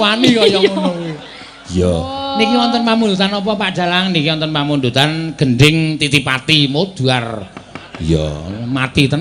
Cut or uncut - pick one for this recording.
uncut